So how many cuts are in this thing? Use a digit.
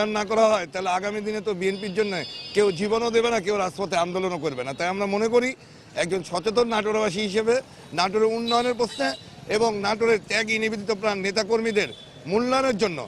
0